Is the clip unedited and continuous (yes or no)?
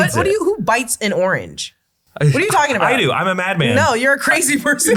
yes